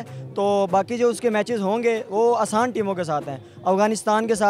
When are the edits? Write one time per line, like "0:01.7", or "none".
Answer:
none